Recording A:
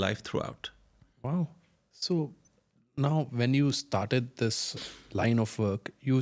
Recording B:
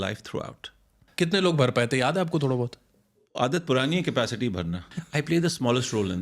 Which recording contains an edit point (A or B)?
B